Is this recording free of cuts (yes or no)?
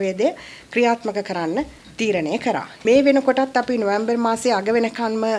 no